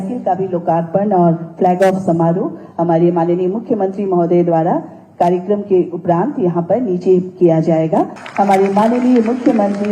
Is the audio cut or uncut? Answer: cut